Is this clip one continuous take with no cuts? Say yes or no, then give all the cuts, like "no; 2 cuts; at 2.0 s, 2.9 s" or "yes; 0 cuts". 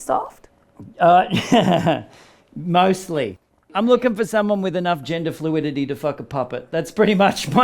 no; 1 cut; at 3.6 s